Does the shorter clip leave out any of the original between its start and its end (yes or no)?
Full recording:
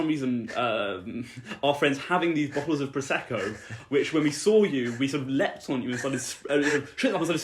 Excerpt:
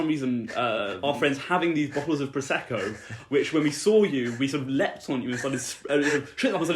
yes